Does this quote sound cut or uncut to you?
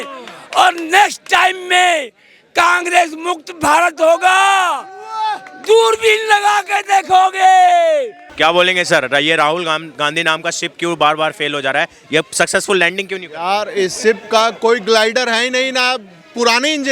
cut